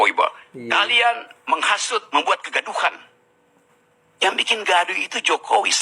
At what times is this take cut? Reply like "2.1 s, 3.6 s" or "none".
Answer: 1.6 s